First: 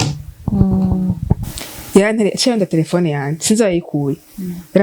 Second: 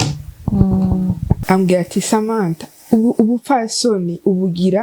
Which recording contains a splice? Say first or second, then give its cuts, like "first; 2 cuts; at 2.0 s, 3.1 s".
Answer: second; 1 cut; at 1.3 s